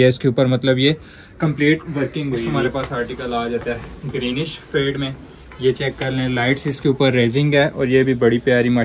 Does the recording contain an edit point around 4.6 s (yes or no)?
no